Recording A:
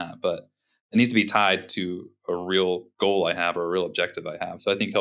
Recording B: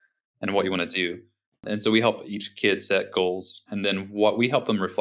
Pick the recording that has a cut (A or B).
B